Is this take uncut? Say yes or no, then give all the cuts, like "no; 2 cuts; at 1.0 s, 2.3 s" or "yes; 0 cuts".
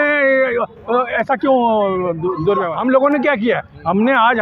no; 1 cut; at 2.7 s